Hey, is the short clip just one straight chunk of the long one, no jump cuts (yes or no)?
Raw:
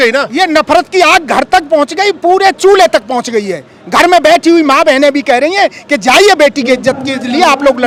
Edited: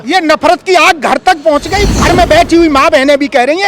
no